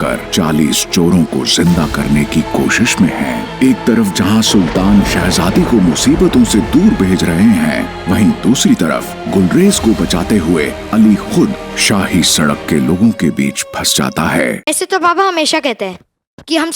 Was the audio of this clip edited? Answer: yes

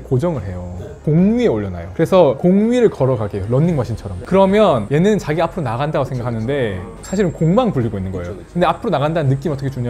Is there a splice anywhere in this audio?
yes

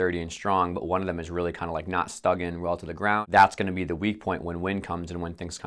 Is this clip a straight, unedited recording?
no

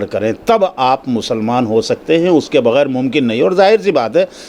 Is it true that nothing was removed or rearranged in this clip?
yes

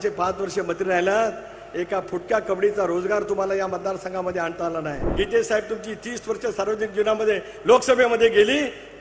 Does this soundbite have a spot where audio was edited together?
yes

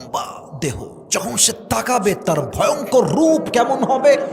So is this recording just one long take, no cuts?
no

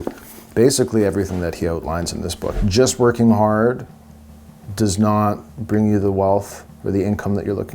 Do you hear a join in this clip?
yes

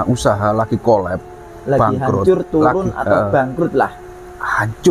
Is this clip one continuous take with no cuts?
yes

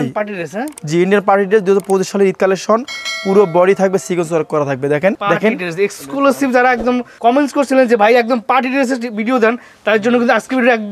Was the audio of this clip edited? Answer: yes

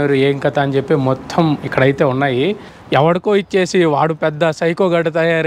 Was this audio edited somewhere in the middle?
yes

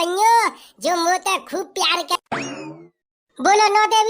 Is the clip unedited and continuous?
no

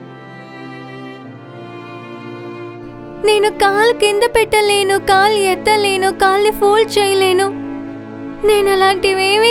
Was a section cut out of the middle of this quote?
yes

